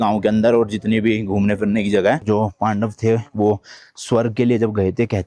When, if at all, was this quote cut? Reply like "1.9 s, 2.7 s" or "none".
2.2 s